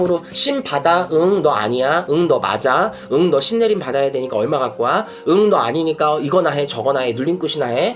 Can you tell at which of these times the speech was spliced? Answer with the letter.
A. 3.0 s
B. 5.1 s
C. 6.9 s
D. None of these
D